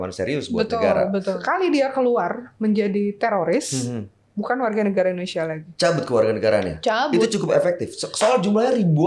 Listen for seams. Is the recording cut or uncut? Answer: cut